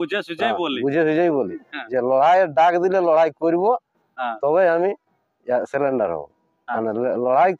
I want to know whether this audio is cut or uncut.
uncut